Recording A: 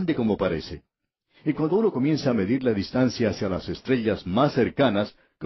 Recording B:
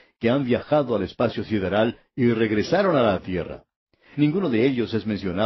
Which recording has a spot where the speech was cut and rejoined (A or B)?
B